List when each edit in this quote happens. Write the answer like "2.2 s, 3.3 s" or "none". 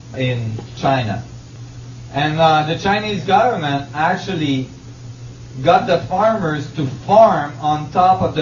6.4 s